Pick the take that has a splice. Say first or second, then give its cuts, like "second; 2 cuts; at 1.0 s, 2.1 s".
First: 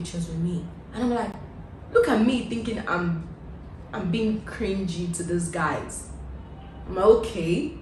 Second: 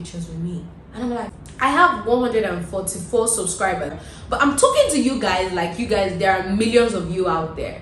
second; 2 cuts; at 1.4 s, 4.0 s